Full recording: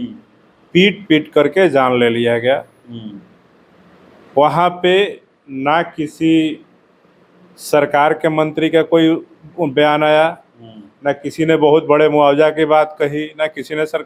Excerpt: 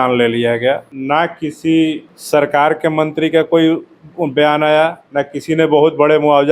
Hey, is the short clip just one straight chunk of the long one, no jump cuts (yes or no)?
no